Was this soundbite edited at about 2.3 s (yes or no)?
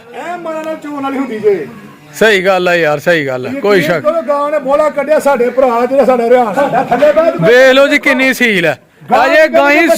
no